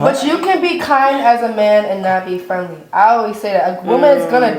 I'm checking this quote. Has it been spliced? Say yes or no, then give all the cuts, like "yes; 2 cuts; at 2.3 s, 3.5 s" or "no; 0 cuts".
no; 0 cuts